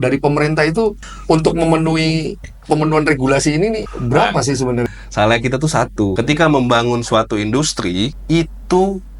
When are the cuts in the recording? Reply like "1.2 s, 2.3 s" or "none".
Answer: 1.1 s, 3.9 s, 4.9 s, 6.1 s, 8.2 s

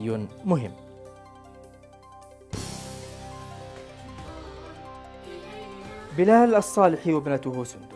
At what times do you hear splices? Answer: 1.8 s, 5.3 s

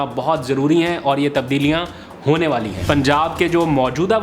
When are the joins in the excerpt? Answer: 2.7 s

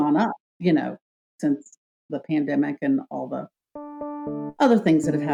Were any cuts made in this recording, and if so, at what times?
none

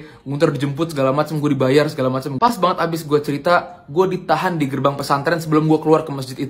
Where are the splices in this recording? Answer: 2.4 s

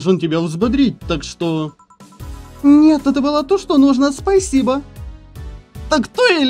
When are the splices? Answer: none

